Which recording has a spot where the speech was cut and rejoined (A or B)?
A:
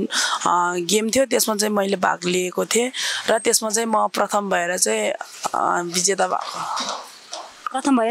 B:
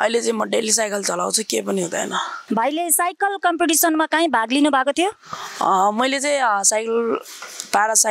B